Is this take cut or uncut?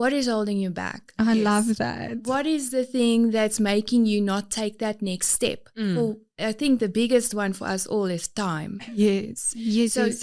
uncut